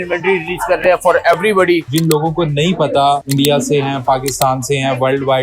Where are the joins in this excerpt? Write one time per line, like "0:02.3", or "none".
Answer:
0:01.9
0:03.3